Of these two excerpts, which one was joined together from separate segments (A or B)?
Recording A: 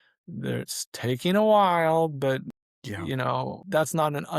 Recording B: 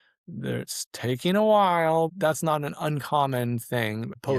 B